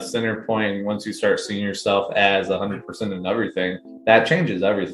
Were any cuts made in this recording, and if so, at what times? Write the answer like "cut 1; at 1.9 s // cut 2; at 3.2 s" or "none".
cut 1; at 3.9 s